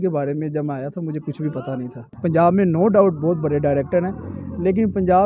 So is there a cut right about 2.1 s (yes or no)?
yes